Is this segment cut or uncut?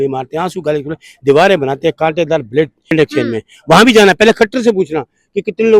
cut